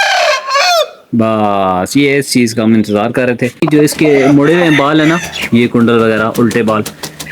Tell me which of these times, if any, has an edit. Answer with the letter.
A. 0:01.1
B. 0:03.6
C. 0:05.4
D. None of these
B